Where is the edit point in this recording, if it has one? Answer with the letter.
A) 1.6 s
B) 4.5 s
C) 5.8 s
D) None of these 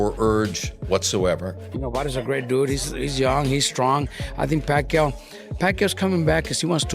A